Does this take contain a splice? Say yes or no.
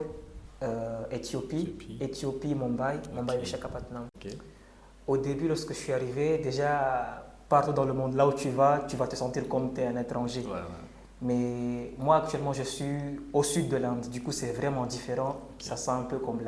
yes